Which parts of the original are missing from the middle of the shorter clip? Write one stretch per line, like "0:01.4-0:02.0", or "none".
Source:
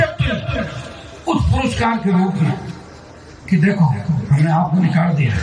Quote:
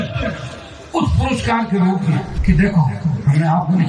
0:02.6-0:03.3